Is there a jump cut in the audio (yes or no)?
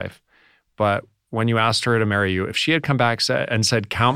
no